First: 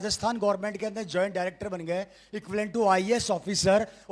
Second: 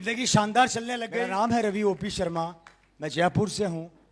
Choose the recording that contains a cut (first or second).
second